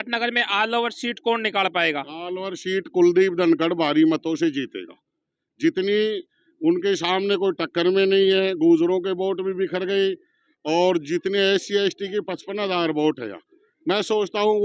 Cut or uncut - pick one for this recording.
uncut